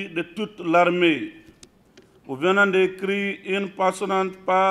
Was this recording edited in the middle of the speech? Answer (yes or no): no